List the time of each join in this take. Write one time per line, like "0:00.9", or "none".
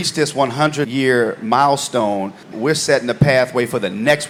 none